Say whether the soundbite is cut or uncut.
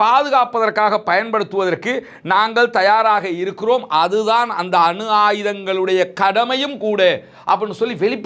uncut